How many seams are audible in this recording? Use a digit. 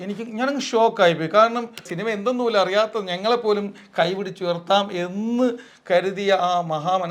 1